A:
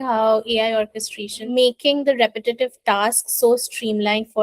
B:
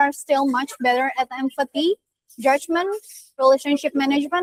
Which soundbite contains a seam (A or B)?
A